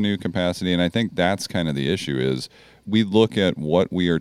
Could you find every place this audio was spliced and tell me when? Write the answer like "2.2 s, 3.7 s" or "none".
2.8 s